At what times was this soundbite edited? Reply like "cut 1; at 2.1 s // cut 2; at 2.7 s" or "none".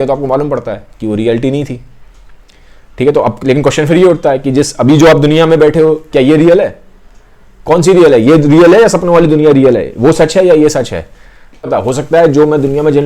cut 1; at 11.7 s